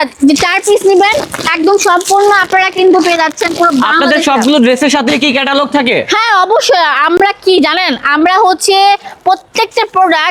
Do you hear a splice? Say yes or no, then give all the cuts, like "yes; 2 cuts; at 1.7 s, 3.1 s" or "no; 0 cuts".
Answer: no; 0 cuts